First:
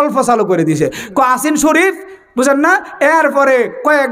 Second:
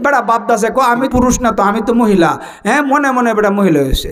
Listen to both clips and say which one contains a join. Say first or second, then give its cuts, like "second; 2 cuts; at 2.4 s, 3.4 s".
second; 1 cut; at 1.1 s